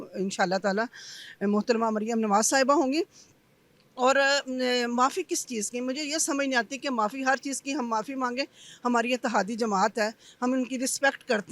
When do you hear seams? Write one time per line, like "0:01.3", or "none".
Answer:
none

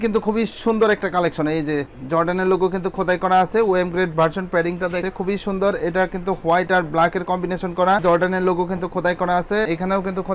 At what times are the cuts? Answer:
0:05.0

